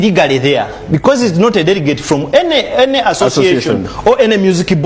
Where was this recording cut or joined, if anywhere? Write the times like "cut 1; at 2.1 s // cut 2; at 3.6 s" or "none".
none